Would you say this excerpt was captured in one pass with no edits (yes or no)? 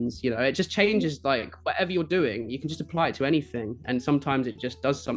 yes